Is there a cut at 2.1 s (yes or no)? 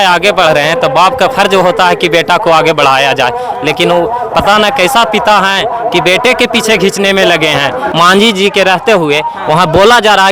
no